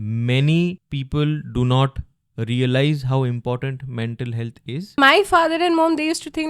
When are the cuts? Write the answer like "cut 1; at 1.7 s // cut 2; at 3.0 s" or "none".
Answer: cut 1; at 0.9 s // cut 2; at 5.0 s